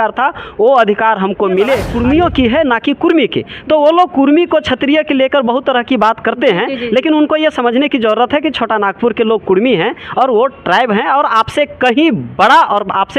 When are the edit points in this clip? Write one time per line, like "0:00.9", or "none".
0:01.9